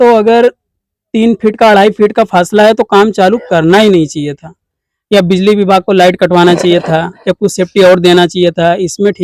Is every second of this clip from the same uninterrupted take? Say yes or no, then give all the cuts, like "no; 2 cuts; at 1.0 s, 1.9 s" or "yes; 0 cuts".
yes; 0 cuts